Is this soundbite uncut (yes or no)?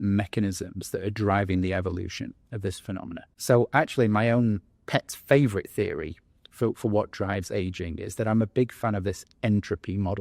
no